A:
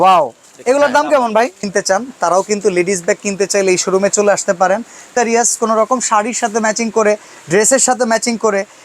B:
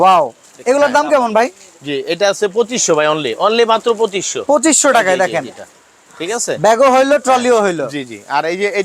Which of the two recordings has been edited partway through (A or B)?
A